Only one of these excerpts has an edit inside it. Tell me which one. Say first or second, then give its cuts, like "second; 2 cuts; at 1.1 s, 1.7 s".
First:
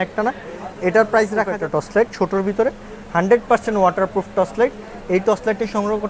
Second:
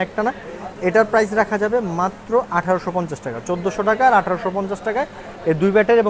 first; 1 cut; at 1.6 s